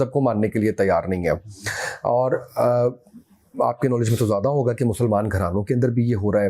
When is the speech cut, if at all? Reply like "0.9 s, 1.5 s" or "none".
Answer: none